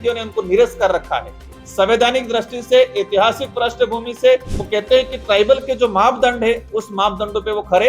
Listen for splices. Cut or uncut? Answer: cut